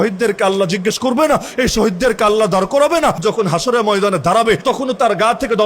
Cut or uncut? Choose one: cut